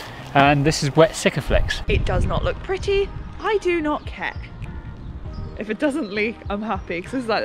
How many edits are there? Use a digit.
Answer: 1